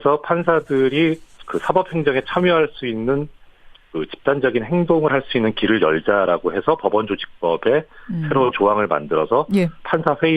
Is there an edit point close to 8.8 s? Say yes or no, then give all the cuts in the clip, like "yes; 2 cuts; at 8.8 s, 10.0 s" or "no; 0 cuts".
yes; 1 cut; at 8.8 s